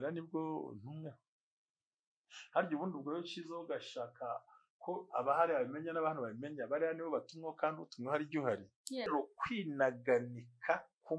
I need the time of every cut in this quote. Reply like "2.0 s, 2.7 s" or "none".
9.1 s